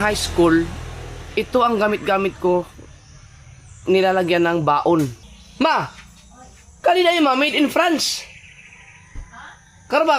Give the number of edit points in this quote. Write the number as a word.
one